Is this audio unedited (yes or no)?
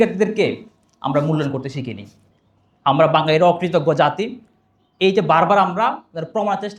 yes